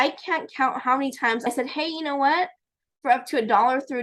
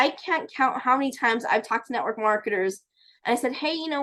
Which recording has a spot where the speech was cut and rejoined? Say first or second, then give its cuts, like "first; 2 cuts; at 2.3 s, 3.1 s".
first; 1 cut; at 1.5 s